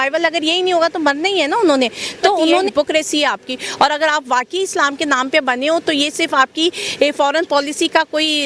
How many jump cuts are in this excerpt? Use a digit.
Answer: 1